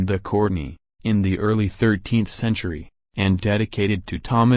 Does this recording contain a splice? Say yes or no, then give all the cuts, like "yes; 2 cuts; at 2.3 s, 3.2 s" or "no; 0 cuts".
yes; 1 cut; at 1.2 s